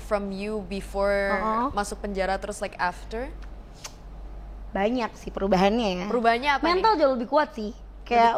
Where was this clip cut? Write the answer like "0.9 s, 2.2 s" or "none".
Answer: none